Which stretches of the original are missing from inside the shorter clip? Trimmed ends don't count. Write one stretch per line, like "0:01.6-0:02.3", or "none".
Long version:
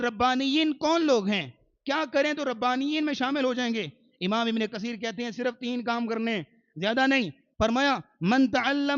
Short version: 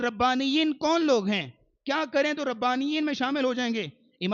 none